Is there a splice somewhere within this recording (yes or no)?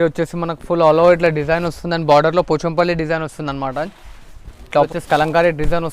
yes